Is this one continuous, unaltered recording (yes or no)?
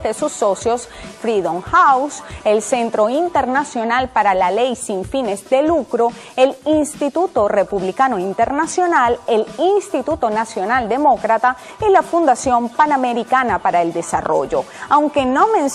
no